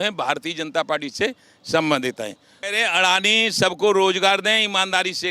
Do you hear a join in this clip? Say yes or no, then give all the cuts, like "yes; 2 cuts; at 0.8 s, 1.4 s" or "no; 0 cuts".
yes; 1 cut; at 2.6 s